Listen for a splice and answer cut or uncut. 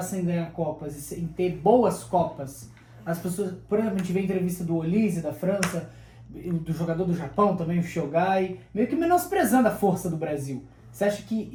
uncut